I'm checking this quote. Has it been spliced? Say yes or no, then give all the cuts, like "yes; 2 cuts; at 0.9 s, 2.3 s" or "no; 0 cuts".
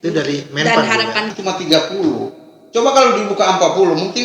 yes; 1 cut; at 1.3 s